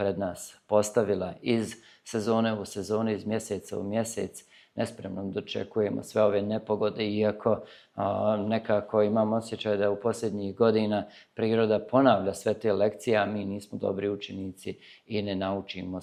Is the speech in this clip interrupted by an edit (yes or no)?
no